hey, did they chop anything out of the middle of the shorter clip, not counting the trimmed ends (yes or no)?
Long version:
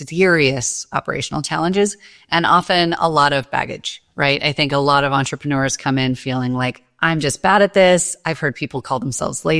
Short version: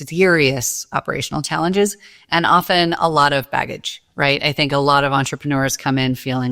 no